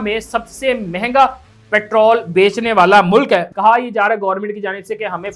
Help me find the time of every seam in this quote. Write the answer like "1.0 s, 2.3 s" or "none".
3.5 s